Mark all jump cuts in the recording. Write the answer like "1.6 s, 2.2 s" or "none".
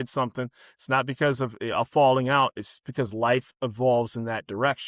none